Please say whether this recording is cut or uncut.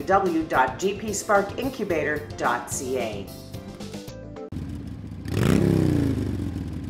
cut